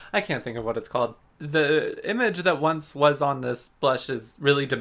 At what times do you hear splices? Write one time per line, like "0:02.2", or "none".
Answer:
0:01.2